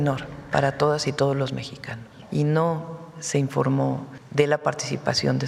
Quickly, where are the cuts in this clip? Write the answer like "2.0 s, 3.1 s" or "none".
2.1 s, 4.2 s